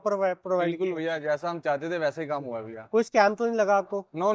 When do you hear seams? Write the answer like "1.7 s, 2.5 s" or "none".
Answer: none